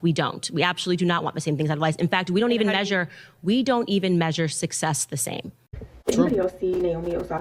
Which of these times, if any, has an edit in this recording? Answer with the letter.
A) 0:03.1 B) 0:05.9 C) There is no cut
B